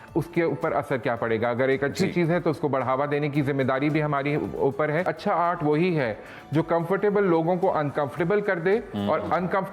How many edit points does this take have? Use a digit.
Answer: 1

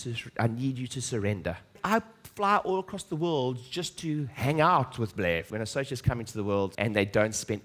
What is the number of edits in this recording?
3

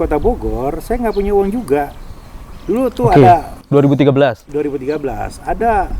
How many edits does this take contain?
0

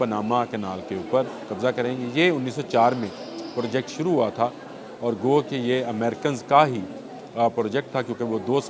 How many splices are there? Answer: 0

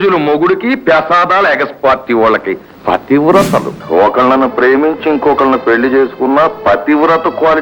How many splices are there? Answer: 1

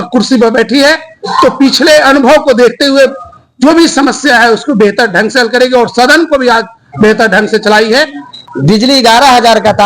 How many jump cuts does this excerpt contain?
1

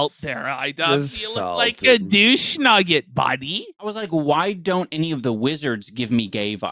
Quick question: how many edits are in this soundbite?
1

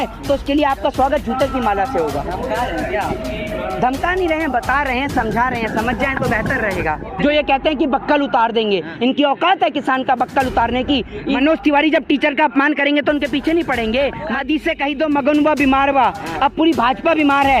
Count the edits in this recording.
3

